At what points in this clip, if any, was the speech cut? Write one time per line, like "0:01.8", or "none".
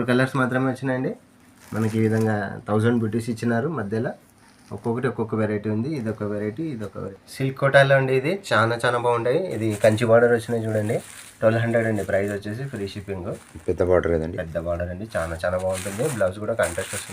0:07.1